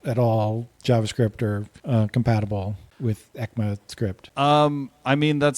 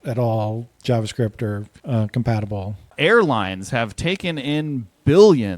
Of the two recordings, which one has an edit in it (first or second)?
second